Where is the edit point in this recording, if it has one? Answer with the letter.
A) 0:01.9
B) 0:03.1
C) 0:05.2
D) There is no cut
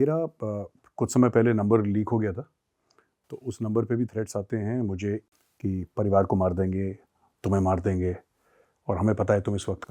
C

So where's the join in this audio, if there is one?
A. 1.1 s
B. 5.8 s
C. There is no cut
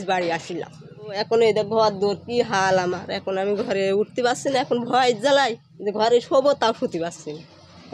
A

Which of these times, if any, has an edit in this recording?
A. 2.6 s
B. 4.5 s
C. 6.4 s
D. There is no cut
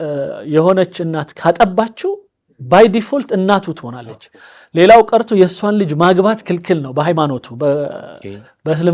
D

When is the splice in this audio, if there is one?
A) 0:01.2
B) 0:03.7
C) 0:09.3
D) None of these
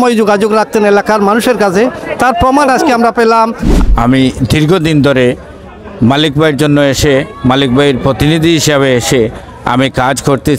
B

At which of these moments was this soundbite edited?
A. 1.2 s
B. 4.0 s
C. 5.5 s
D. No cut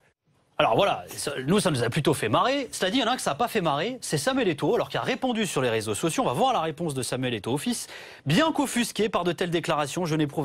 D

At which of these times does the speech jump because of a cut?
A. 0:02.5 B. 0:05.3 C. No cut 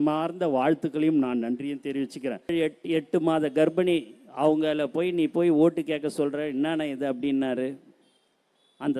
A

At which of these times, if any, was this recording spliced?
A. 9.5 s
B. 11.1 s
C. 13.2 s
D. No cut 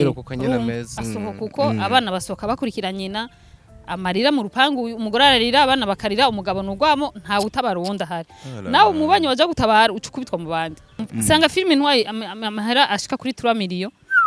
B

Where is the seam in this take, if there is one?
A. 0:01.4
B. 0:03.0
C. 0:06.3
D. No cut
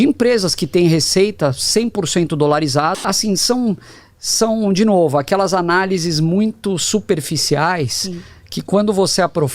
B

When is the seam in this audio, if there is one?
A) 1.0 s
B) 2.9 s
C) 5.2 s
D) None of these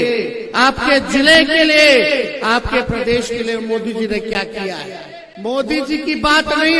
C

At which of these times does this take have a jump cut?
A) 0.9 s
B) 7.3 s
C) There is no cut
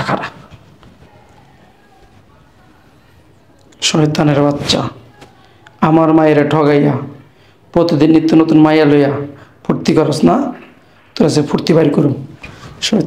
C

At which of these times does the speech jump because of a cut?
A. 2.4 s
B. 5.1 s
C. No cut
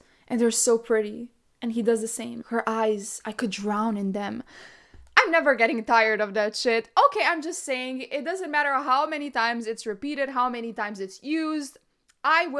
A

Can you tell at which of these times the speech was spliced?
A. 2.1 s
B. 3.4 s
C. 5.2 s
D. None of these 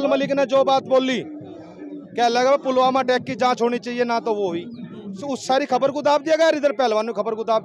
C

